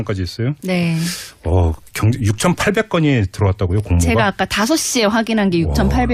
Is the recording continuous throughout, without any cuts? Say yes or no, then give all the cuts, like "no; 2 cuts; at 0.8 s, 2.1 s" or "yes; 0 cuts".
no; 1 cut; at 1.5 s